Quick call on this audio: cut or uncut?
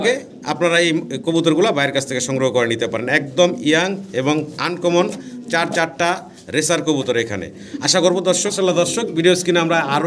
cut